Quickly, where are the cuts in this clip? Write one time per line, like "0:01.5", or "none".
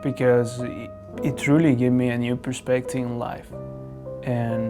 none

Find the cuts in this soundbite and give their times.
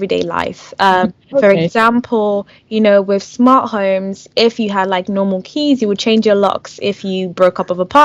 0:01.2

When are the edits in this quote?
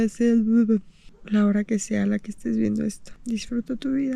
0:03.1

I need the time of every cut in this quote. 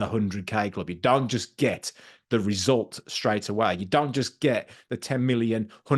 none

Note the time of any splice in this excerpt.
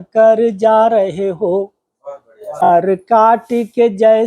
0:02.7

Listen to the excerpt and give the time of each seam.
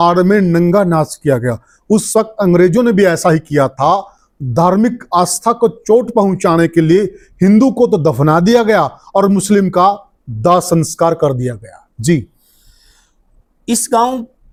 none

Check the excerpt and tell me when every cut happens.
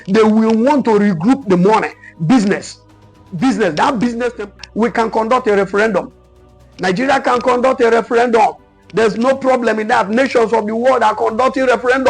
0:04.6

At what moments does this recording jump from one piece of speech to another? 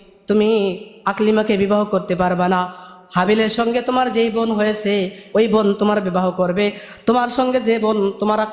none

